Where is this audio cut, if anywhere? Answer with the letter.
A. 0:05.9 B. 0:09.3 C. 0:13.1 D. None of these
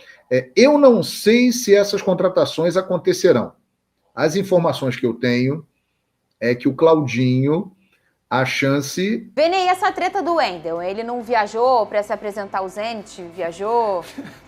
B